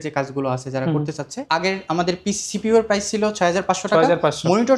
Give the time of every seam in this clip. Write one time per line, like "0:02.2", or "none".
0:01.4